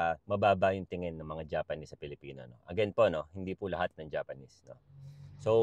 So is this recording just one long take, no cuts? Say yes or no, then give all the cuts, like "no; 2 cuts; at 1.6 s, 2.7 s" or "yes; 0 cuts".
yes; 0 cuts